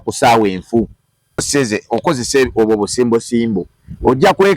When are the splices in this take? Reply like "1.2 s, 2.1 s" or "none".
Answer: 1.5 s